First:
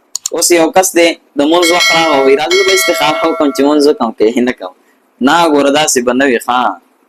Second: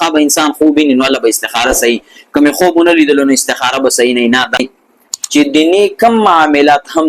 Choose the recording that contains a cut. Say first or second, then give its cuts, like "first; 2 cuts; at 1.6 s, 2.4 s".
second; 1 cut; at 4.6 s